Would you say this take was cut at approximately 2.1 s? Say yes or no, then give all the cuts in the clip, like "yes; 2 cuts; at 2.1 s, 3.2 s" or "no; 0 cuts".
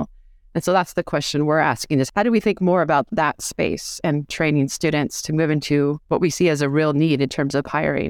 yes; 2 cuts; at 2.1 s, 6.0 s